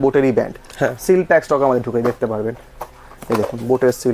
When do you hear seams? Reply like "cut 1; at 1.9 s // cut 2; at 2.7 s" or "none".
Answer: none